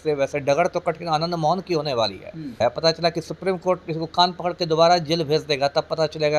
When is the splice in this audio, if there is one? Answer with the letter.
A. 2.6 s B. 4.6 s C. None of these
A